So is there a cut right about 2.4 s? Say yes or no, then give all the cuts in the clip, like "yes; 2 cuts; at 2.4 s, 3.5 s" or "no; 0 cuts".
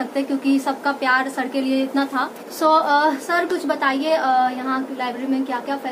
yes; 1 cut; at 2.4 s